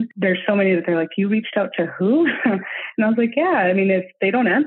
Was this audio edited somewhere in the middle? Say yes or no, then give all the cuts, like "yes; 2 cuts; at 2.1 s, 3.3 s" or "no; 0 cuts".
no; 0 cuts